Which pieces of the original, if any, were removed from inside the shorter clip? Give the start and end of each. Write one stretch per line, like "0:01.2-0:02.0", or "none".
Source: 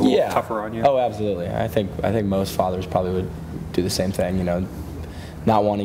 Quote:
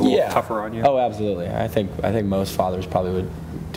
none